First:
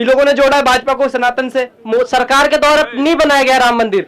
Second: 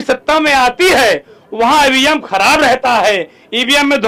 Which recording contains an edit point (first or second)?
first